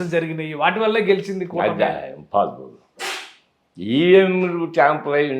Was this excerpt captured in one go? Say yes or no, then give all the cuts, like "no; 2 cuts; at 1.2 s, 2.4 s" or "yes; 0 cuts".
yes; 0 cuts